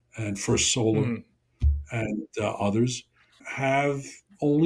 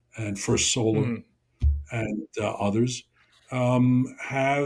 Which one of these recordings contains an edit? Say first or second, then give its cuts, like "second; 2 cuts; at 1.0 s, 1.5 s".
first; 1 cut; at 3.5 s